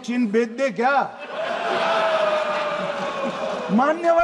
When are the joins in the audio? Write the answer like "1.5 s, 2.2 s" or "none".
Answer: none